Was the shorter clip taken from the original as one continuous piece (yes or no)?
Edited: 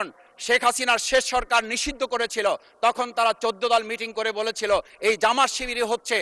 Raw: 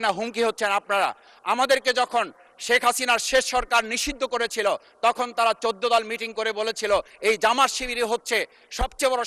yes